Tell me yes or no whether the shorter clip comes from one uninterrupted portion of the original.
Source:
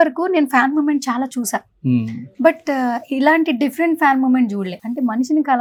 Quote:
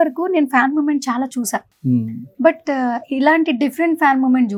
yes